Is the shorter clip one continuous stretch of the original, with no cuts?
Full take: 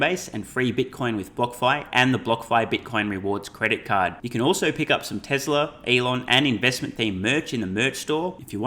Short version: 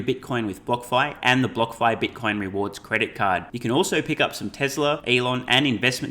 no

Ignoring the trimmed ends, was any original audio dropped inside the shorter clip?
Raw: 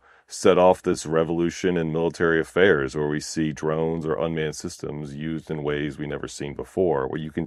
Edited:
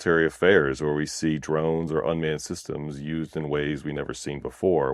no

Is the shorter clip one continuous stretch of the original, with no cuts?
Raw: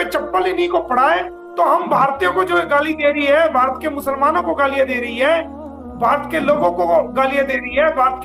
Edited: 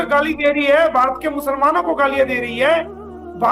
yes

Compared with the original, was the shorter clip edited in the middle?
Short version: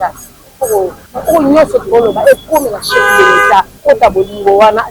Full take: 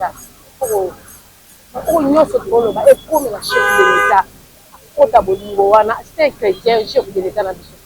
yes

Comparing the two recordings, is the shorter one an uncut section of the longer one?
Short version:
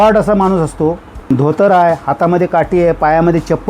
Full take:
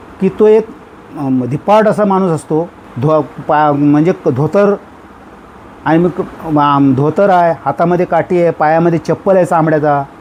no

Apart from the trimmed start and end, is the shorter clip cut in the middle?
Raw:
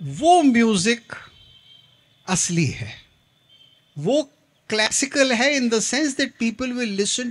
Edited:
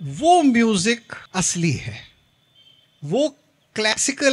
yes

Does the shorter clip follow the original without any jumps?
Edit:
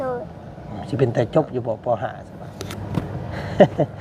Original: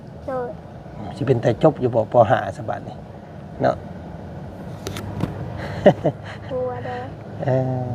no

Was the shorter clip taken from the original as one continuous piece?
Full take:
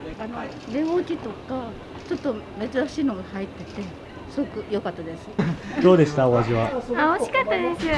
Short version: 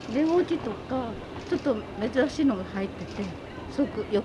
yes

